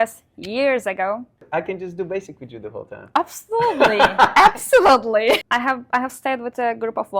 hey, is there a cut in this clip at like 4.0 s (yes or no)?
no